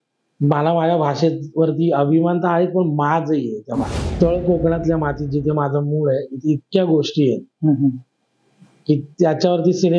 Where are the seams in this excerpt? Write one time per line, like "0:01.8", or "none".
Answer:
0:04.0